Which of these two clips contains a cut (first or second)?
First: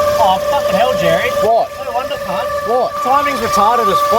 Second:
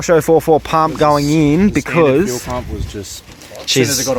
first